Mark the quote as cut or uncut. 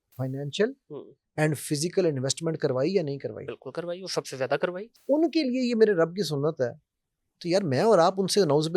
cut